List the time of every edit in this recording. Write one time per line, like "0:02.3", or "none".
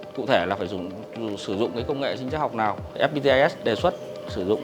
0:03.0